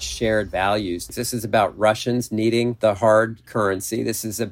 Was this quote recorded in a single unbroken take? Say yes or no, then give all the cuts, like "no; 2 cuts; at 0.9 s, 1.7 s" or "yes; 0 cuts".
no; 2 cuts; at 1.1 s, 2.7 s